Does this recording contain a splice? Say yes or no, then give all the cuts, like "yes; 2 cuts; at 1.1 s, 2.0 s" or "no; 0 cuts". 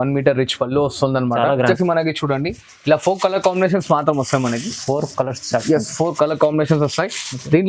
yes; 1 cut; at 1.6 s